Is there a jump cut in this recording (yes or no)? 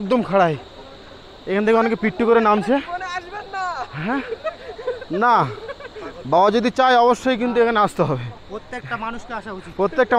no